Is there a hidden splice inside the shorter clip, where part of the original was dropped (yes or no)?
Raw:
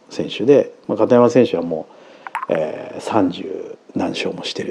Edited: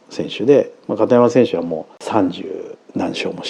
yes